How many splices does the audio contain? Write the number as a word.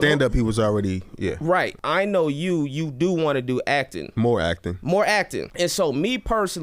three